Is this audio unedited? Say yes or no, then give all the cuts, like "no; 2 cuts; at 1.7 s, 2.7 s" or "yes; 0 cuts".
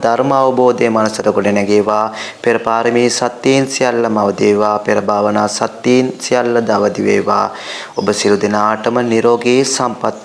yes; 0 cuts